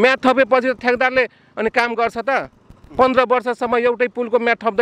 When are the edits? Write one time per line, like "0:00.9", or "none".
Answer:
none